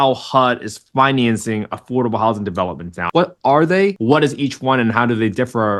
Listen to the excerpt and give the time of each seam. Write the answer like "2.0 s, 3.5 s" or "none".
3.1 s, 4.0 s